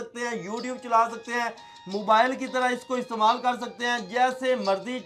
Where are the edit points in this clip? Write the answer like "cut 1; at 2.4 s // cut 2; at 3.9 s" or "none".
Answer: none